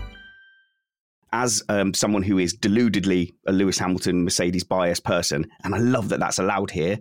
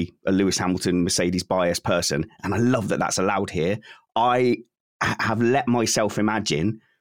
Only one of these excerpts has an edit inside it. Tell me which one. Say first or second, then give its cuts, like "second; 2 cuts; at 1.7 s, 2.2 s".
first; 1 cut; at 1.1 s